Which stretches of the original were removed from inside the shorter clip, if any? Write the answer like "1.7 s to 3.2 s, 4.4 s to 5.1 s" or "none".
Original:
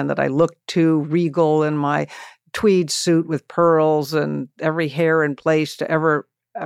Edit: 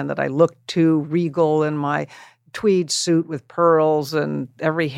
none

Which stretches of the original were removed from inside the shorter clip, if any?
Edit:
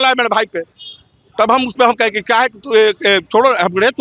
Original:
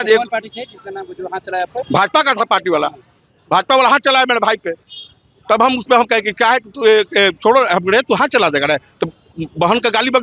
none

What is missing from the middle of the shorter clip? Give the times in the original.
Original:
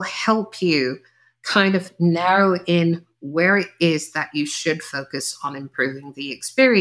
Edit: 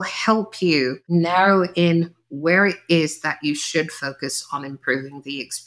1.0 s to 1.9 s

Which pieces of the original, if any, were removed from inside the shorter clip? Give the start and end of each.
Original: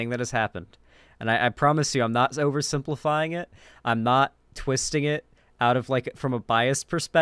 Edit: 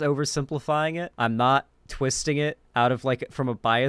3.4 s to 3.7 s, 5.3 s to 5.5 s

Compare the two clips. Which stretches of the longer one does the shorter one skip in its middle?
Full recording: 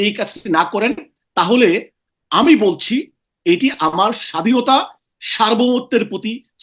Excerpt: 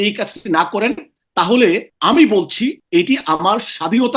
1.9 s to 2.2 s, 3.1 s to 3.3 s

